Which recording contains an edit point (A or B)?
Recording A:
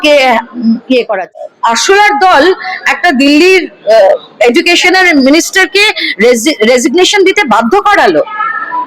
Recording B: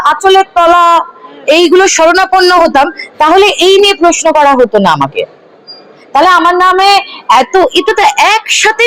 A